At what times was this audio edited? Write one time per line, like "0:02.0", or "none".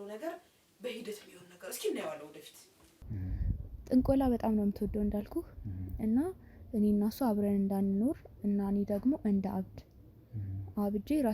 0:03.0

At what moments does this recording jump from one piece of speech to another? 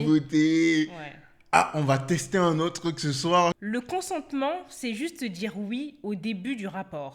0:03.6

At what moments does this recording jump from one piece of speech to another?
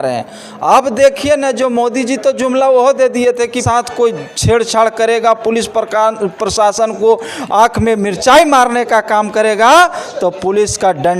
0:03.6

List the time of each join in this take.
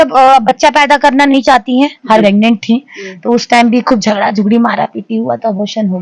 0:02.2

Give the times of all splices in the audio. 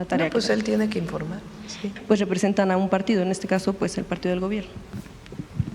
0:01.9

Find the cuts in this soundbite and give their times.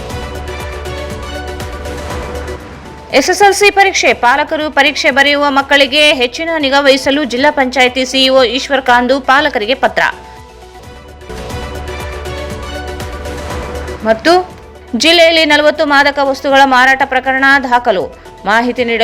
none

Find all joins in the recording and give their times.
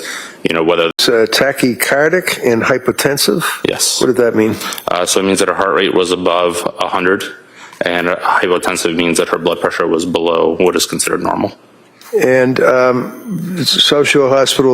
0:00.9

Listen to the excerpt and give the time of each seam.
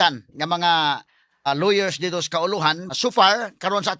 0:01.5
0:02.9

